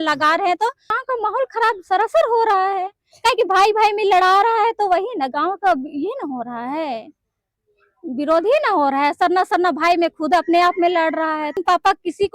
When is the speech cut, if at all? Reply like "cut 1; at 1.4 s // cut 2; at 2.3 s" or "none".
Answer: cut 1; at 1.0 s // cut 2; at 11.5 s